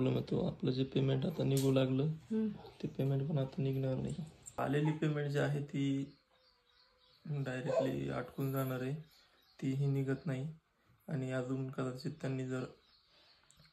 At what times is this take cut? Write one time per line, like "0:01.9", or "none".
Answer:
0:04.6